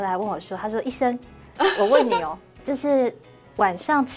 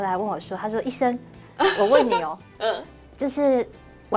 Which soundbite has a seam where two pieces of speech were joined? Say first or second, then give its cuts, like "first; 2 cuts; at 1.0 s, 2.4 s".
first; 1 cut; at 2.4 s